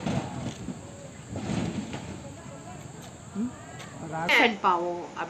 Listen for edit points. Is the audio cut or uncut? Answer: uncut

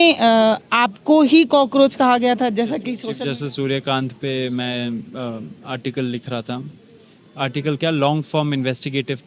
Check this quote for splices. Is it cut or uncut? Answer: cut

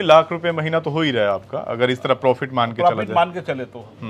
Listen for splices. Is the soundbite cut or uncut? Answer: uncut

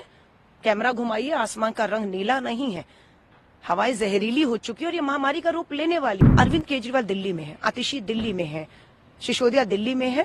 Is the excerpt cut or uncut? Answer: cut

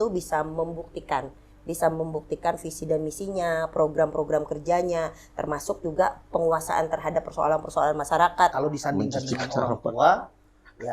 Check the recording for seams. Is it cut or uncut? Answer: cut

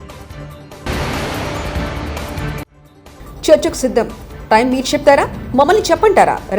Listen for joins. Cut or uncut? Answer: cut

